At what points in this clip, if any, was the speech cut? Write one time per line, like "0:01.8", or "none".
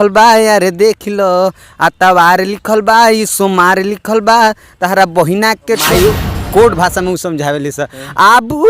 0:05.8